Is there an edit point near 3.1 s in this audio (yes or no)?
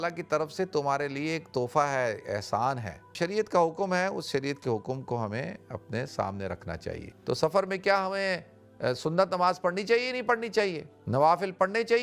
yes